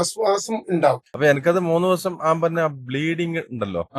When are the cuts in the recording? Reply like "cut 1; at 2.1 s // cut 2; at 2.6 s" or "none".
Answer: cut 1; at 1.1 s

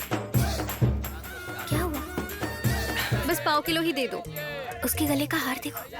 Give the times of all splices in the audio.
cut 1; at 1.1 s // cut 2; at 3.1 s

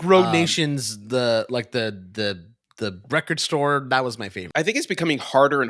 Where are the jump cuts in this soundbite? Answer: cut 1; at 4.4 s

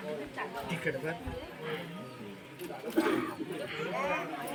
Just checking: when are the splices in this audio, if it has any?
none

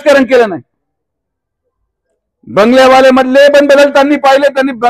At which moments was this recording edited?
none

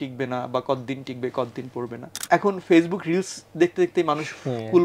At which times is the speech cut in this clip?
cut 1; at 2.1 s

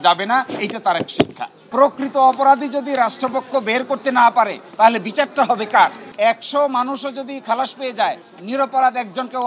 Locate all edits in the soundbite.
cut 1; at 1.6 s // cut 2; at 6.0 s

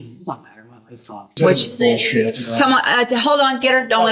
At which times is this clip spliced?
cut 1; at 1.4 s

